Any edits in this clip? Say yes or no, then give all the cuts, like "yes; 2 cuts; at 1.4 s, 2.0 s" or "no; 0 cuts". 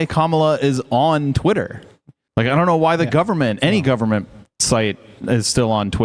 no; 0 cuts